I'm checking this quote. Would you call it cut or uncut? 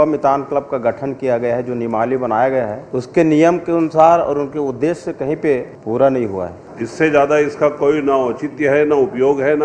cut